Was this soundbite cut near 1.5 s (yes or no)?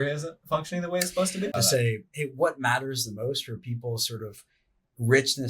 yes